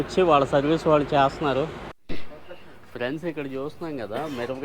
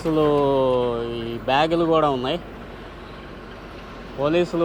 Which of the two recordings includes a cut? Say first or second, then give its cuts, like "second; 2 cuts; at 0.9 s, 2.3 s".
first; 1 cut; at 2.0 s